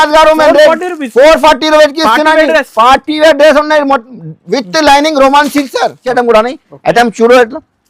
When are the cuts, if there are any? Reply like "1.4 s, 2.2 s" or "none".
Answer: 6.0 s